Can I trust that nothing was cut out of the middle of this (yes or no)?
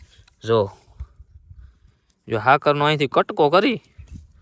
yes